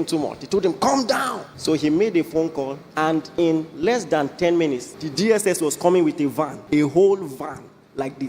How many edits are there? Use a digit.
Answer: 4